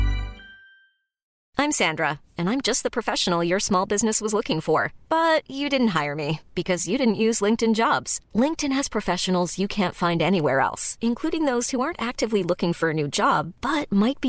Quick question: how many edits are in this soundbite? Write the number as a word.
one